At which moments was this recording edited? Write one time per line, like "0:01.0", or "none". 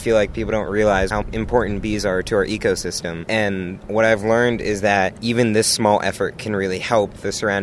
0:01.1
0:03.1